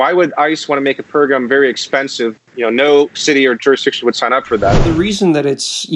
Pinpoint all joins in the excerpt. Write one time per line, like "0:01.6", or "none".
0:04.8